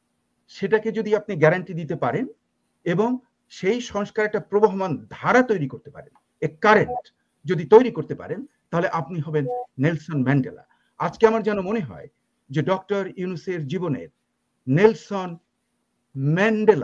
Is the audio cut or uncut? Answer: uncut